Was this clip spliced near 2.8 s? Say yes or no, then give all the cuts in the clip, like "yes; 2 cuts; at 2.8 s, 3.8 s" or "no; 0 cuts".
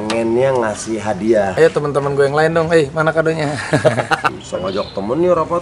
no; 2 cuts; at 1.5 s, 4.3 s